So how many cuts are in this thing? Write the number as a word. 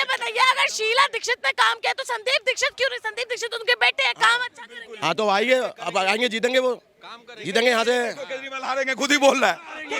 zero